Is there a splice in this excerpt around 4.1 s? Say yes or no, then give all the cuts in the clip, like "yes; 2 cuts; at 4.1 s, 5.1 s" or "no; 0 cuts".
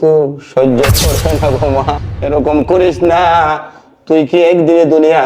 no; 1 cut; at 2.1 s